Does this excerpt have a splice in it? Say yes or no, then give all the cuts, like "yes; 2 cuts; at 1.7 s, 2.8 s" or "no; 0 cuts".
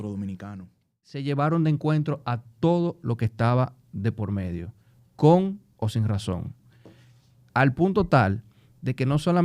yes; 1 cut; at 1.1 s